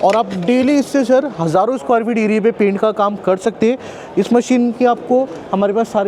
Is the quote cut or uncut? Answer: uncut